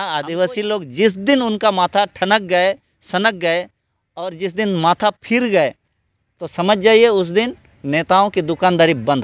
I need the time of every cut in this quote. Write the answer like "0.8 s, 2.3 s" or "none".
none